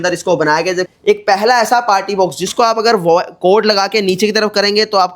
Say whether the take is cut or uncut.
cut